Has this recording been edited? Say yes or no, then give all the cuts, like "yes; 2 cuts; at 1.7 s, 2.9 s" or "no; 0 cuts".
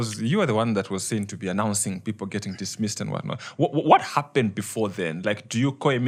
no; 0 cuts